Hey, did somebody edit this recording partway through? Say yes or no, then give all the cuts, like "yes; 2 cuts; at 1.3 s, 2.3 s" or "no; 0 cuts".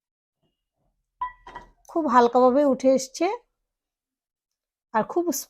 no; 0 cuts